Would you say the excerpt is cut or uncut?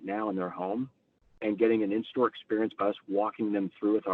uncut